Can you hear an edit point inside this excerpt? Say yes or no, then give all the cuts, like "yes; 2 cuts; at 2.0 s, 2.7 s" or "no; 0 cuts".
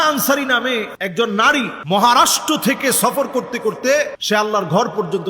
yes; 3 cuts; at 1.0 s, 1.8 s, 4.2 s